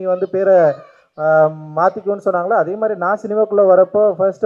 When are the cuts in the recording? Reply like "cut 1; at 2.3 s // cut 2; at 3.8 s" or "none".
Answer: none